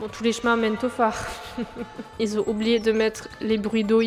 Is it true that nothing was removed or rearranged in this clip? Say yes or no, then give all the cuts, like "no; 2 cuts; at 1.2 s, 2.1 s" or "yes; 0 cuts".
no; 1 cut; at 2.1 s